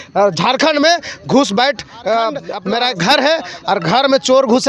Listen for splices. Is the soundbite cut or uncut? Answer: cut